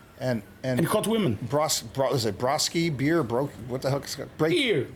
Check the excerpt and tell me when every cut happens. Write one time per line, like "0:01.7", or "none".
none